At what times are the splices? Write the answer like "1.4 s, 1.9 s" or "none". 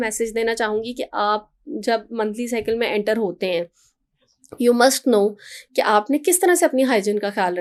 none